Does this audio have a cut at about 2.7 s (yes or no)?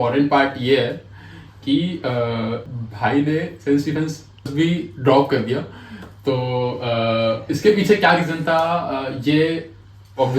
yes